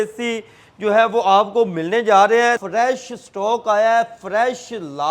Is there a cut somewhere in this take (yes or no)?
yes